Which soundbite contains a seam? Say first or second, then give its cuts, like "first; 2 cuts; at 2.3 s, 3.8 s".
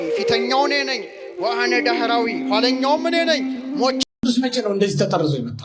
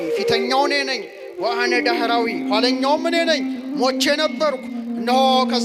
first; 1 cut; at 4.0 s